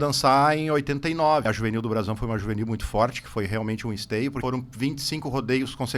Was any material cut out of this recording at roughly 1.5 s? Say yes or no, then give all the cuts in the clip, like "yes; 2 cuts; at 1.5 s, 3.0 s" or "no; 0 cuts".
yes; 2 cuts; at 1.5 s, 4.4 s